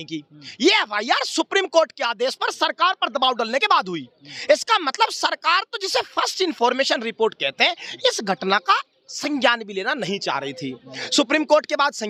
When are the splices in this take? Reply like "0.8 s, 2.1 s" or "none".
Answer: none